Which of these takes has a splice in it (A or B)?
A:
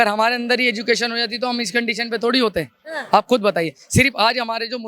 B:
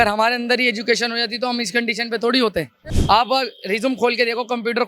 B